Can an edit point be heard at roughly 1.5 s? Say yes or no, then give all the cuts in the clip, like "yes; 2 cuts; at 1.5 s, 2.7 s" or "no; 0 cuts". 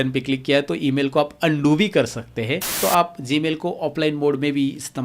no; 1 cut; at 2.8 s